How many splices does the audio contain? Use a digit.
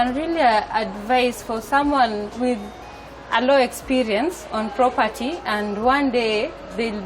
0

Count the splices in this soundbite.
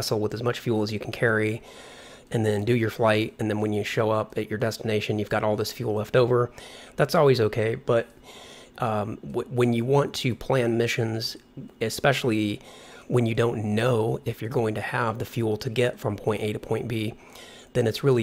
1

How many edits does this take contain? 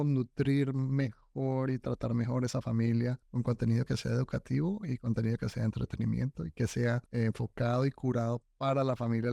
2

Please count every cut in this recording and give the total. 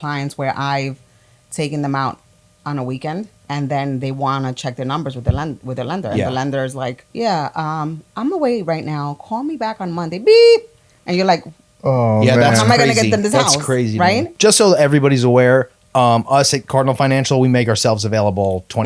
3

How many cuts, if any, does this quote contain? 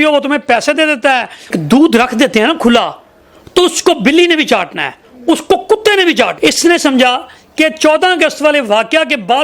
2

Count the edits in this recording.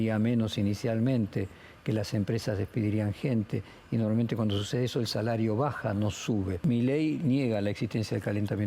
1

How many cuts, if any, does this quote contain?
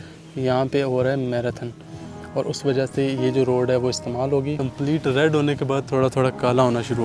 1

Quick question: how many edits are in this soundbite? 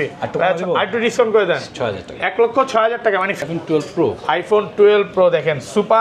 1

